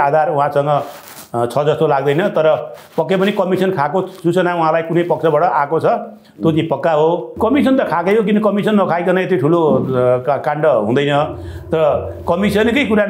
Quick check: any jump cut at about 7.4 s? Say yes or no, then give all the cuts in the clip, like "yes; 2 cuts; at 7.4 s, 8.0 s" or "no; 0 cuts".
yes; 1 cut; at 7.4 s